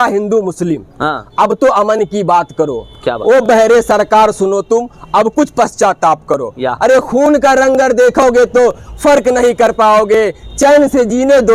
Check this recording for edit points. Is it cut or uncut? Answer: uncut